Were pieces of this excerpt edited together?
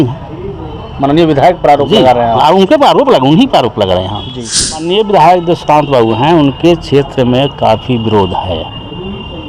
yes; 1 cut; at 4.9 s

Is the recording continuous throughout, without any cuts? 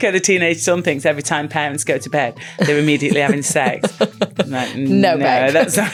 yes; 0 cuts

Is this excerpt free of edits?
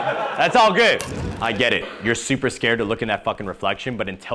no; 1 cut; at 1.3 s

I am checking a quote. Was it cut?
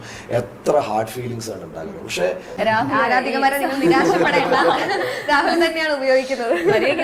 yes; 1 cut; at 2.5 s

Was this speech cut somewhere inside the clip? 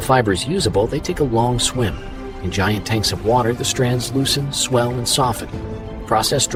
no; 0 cuts

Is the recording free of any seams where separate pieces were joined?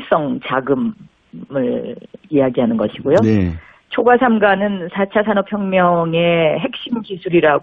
yes; 0 cuts

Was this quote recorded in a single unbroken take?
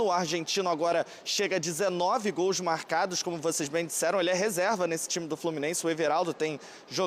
yes; 0 cuts

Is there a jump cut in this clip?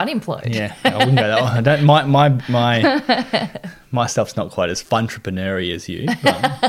no; 0 cuts

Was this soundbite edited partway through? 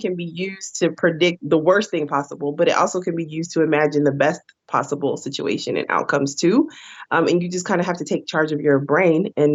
no; 0 cuts

